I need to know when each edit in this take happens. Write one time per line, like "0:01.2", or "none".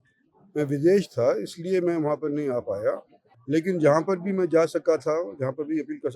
none